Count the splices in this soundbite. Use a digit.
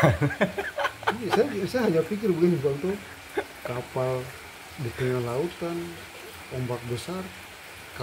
0